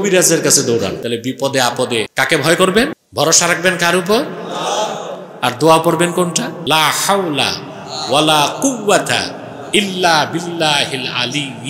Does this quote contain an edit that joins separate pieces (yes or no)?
yes